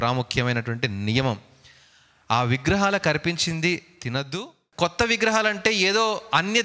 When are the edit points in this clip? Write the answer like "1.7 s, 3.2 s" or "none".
4.4 s